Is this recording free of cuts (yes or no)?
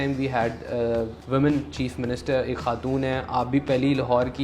no